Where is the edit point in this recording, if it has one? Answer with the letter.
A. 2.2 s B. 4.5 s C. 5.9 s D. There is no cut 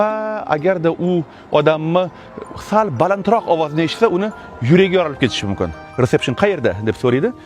C